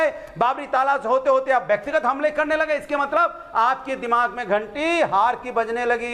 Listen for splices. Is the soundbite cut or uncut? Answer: uncut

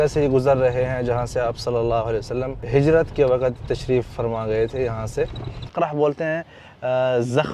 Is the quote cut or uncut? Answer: cut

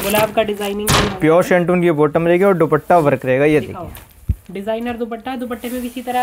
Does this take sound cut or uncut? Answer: uncut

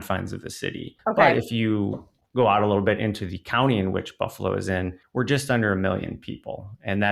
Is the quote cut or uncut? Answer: cut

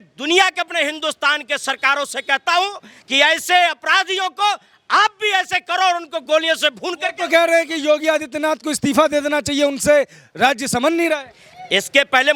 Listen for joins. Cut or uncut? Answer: uncut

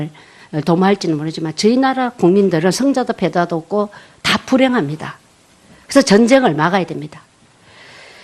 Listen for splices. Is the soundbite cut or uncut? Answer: cut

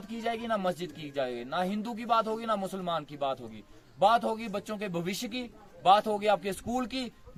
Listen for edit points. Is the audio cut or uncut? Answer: uncut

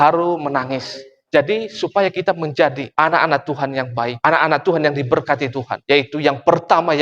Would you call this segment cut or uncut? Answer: cut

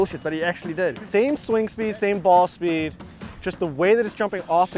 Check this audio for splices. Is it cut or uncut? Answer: cut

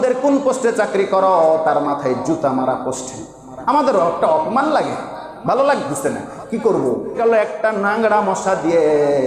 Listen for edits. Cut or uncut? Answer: cut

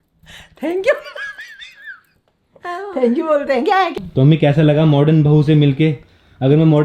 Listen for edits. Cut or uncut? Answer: cut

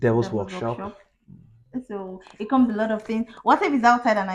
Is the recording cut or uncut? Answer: uncut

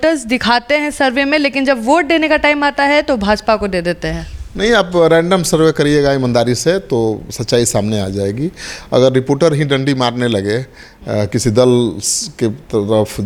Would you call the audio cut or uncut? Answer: uncut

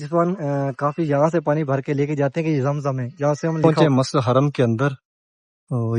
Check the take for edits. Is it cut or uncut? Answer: cut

